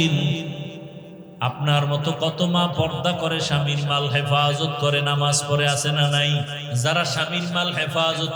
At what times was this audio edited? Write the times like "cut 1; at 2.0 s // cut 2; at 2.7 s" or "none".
cut 1; at 6.6 s